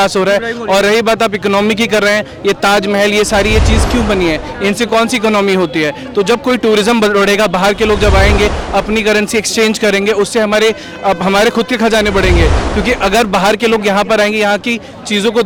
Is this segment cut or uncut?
uncut